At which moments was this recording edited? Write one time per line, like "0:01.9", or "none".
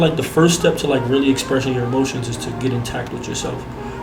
none